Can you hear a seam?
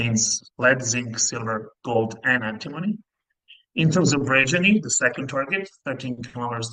no; 0 cuts

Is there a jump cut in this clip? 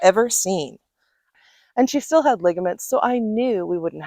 yes; 1 cut; at 1.3 s

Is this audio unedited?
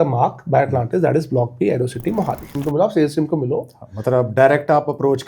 no; 1 cut; at 2.5 s

